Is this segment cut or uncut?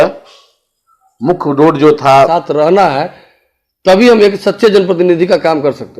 cut